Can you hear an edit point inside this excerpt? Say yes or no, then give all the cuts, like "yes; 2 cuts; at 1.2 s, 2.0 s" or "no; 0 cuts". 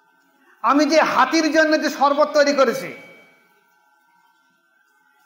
no; 0 cuts